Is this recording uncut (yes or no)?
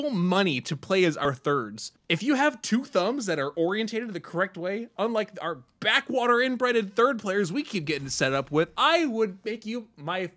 no